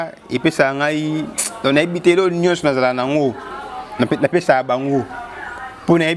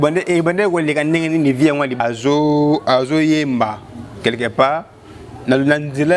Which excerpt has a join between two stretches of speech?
second; 1 cut; at 2.0 s

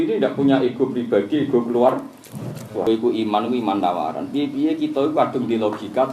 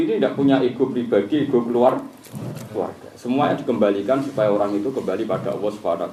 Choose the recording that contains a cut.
first; 1 cut; at 2.8 s

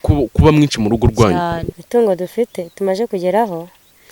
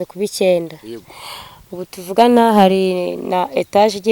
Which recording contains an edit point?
first; 1 cut; at 1.7 s

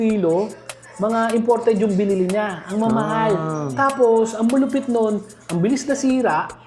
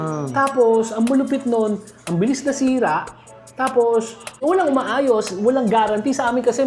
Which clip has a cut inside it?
second; 1 cut; at 4.4 s

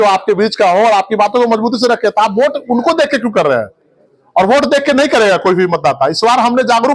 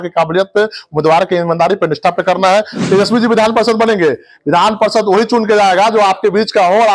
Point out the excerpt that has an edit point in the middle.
second; 1 cut; at 2.8 s

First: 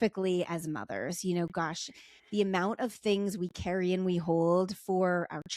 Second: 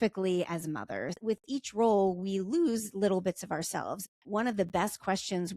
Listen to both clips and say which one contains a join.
second; 2 cuts; at 1.1 s, 4.0 s

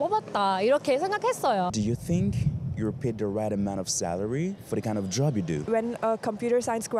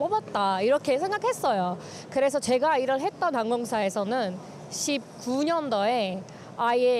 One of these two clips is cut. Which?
first; 3 cuts; at 1.7 s, 4.6 s, 5.6 s

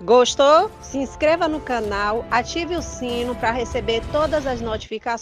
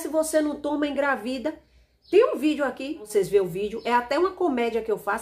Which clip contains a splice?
second; 1 cut; at 3.1 s

